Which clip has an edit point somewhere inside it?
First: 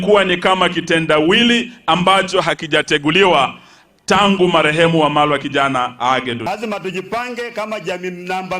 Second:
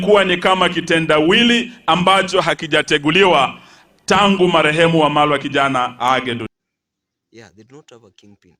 first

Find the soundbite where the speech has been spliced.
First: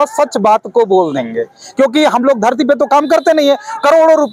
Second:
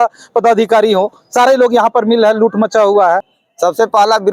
second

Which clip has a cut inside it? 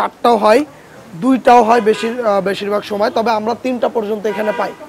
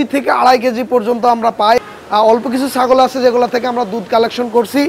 second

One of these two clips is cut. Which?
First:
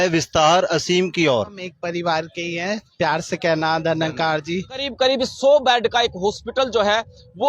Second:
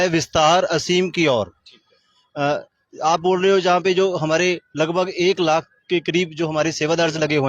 first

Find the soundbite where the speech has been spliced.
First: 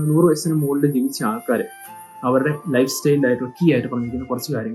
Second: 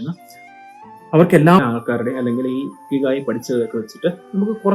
second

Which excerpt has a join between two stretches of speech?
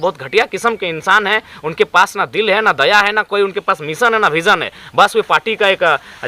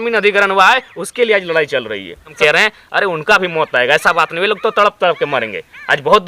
second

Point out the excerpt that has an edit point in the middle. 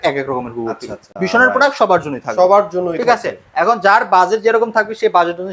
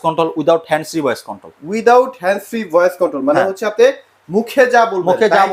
first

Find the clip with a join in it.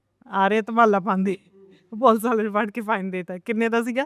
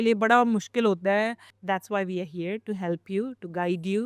second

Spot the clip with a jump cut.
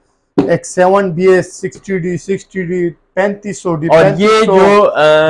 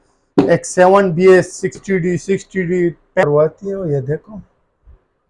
second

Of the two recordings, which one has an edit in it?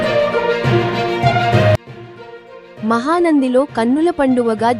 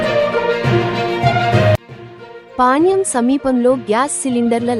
second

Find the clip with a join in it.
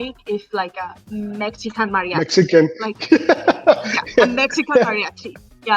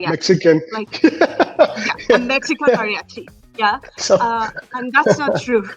first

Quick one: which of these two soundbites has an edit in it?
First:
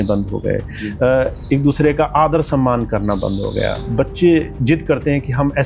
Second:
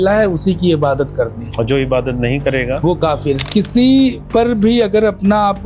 second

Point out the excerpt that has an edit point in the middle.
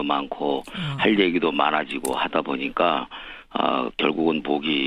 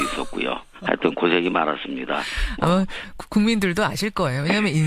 first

